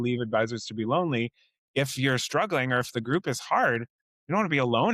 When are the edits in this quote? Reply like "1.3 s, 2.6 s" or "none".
none